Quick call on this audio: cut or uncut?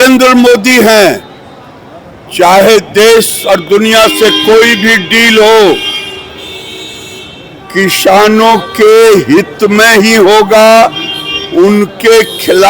uncut